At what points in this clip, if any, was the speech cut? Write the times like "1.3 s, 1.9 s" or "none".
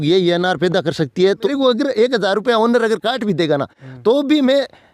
1.5 s